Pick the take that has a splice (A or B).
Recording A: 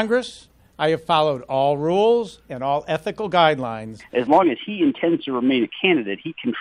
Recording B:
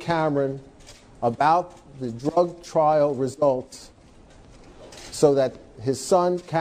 A